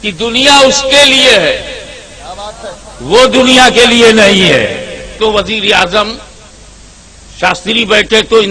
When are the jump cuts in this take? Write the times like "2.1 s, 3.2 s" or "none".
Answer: 5.2 s

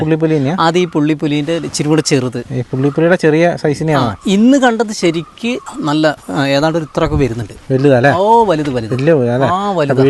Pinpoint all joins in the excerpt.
2.5 s, 5.7 s

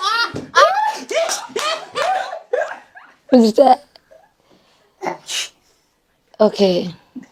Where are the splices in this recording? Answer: none

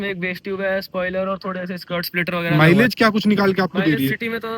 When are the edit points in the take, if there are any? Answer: 2.5 s

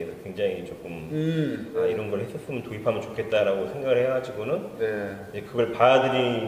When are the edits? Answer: 1.8 s

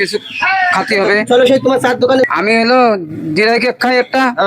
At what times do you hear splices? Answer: 2.2 s

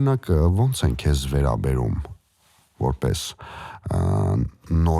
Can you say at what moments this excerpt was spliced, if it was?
none

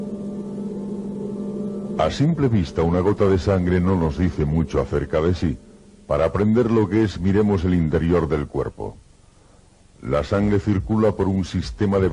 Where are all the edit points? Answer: 3.7 s

